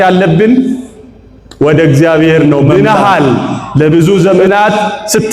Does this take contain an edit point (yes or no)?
yes